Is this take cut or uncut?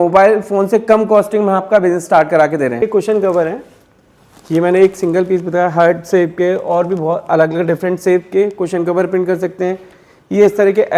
cut